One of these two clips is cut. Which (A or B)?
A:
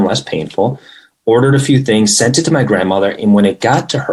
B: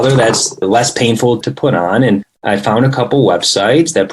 B